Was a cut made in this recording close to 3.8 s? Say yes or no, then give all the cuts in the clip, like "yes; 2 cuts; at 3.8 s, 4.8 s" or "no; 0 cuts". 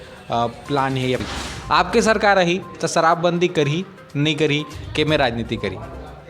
no; 1 cut; at 1.3 s